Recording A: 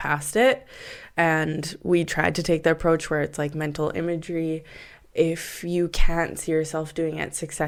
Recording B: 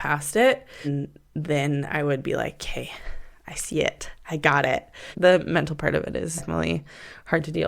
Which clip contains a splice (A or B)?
B